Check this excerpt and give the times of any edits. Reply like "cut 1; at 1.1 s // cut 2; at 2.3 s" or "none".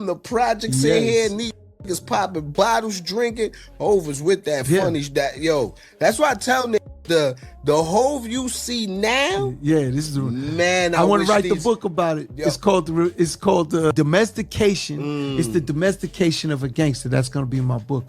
cut 1; at 13.9 s